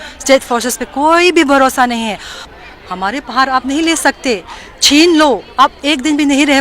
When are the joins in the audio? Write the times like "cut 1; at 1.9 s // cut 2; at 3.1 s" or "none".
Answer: cut 1; at 2.4 s